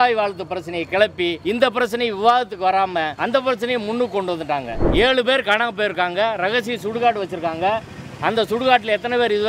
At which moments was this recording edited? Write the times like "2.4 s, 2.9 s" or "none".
1.4 s, 3.1 s, 4.8 s